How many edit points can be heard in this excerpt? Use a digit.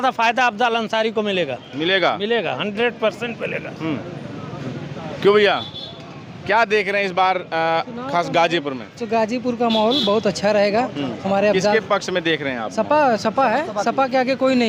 0